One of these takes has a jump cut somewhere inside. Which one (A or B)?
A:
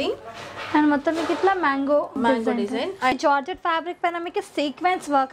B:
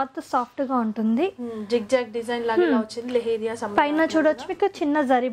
A